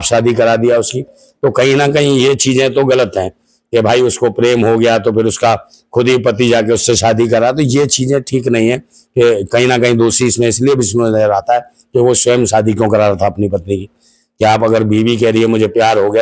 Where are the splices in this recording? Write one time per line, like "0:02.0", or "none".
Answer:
none